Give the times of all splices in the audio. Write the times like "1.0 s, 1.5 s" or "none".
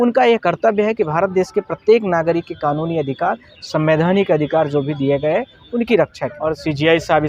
6.3 s